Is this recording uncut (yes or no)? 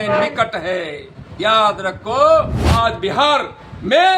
no